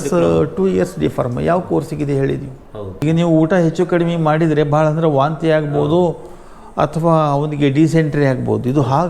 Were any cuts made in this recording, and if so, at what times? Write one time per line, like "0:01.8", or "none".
0:03.0

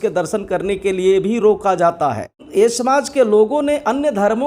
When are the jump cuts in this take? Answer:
0:02.4

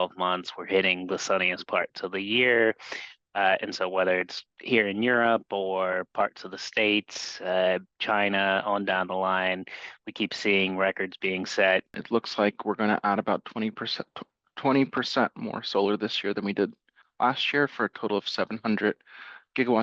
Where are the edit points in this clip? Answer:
0:12.0

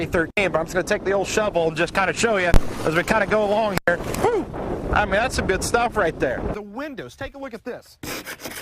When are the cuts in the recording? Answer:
0:06.5

